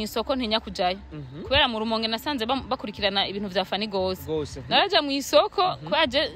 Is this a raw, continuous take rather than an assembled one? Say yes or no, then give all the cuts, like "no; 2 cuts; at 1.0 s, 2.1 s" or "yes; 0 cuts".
yes; 0 cuts